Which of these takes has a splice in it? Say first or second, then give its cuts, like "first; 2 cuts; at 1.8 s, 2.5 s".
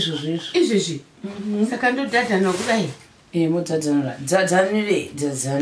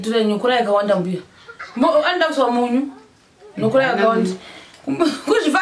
second; 1 cut; at 1.0 s